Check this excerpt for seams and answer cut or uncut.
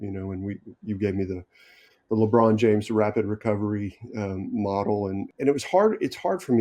cut